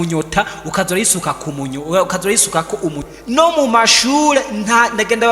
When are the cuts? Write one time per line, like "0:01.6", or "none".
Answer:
0:03.0